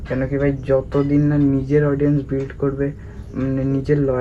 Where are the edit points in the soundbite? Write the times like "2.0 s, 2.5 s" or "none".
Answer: none

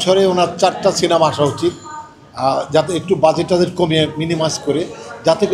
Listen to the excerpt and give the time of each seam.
none

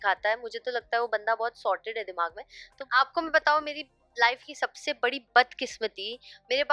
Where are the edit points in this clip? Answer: 2.8 s

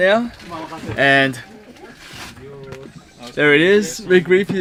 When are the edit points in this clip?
none

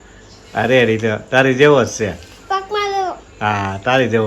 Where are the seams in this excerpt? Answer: none

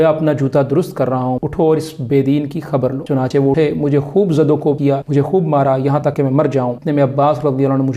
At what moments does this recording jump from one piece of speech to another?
1.4 s, 3.3 s, 4.8 s, 6.3 s

